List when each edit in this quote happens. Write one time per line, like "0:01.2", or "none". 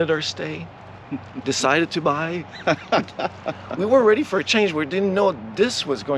none